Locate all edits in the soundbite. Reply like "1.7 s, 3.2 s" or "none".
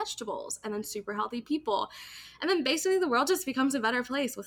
none